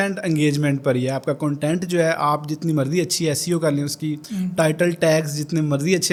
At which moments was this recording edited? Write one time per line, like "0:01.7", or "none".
none